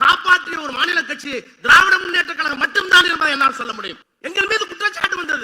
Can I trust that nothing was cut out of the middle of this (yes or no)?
no